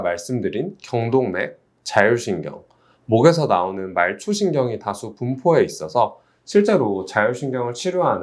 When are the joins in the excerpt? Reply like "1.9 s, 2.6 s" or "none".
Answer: none